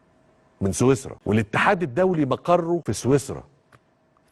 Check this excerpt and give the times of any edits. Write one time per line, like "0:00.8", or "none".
0:01.1
0:02.8